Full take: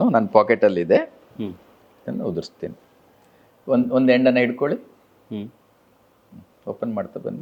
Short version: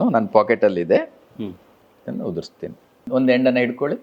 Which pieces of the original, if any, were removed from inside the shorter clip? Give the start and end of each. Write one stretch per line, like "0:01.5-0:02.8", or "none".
0:03.1-0:03.9